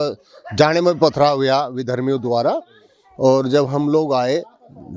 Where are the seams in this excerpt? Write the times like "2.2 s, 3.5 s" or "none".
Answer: none